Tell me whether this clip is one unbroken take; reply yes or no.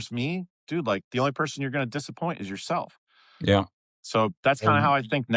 yes